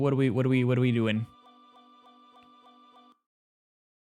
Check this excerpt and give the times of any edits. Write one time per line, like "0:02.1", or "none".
none